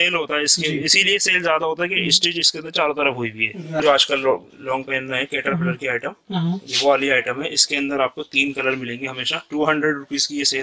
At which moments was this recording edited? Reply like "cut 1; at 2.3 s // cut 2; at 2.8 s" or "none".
cut 1; at 3.8 s